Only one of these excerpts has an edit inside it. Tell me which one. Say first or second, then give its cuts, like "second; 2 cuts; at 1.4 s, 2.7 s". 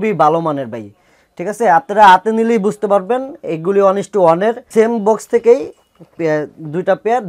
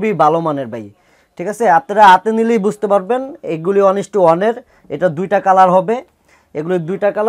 first; 1 cut; at 4.6 s